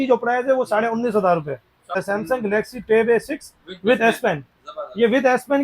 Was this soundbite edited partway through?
yes; 1 cut; at 2.0 s

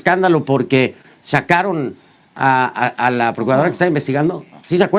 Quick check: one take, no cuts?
yes; 0 cuts

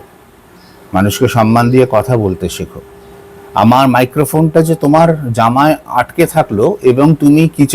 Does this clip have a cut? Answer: yes; 1 cut; at 3.4 s

